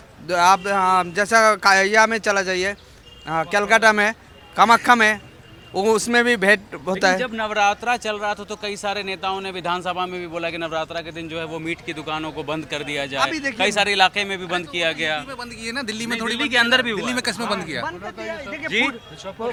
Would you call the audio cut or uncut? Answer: uncut